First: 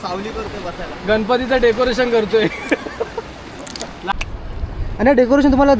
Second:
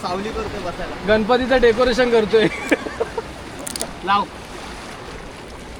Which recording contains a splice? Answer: first; 1 cut; at 4.1 s

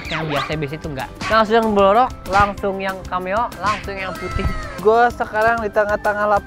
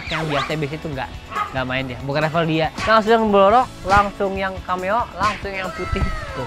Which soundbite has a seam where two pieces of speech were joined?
first; 2 cuts; at 1.2 s, 4.8 s

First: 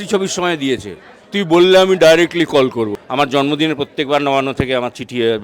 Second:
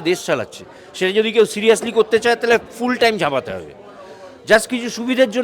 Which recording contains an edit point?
first; 1 cut; at 2.9 s

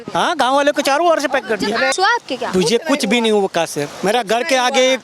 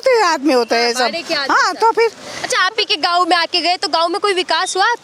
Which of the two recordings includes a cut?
first; 1 cut; at 1.9 s

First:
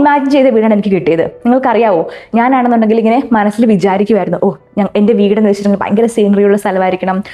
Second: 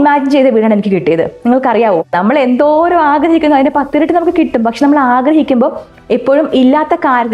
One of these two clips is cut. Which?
second; 1 cut; at 2.1 s

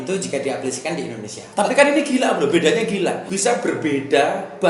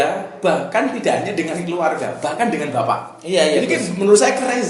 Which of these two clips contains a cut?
first; 2 cuts; at 1.5 s, 3.2 s

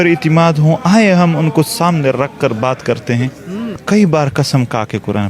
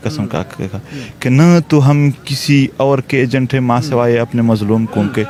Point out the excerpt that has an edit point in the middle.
first; 1 cut; at 3.8 s

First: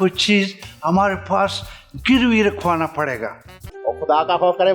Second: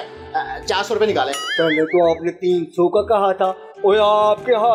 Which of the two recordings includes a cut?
first; 1 cut; at 3.7 s

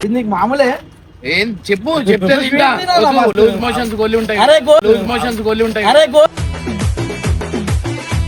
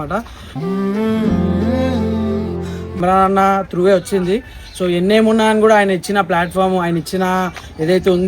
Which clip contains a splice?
second; 1 cut; at 3.0 s

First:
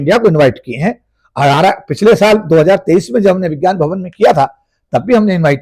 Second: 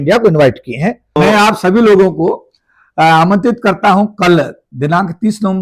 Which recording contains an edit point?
second; 1 cut; at 1.2 s

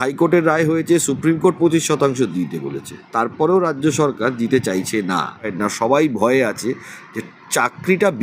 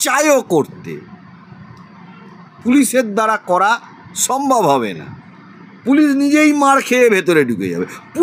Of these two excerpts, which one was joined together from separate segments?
first; 1 cut; at 5.5 s

